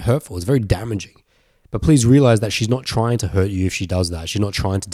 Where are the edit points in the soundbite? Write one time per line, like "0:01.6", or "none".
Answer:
none